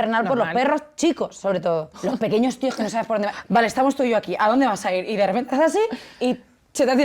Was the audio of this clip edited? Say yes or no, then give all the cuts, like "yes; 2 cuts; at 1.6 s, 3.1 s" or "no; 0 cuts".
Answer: yes; 2 cuts; at 2.0 s, 3.4 s